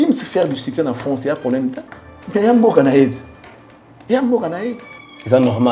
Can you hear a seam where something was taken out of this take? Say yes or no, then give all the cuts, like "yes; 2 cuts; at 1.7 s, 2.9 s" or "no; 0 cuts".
no; 0 cuts